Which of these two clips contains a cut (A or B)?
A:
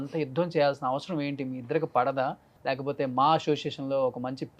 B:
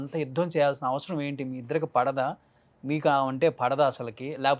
A